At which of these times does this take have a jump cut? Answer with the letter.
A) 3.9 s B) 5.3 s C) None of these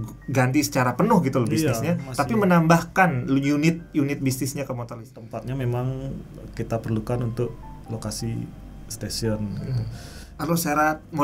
B